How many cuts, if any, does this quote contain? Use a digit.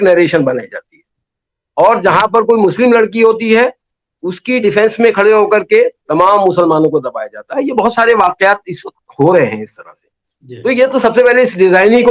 0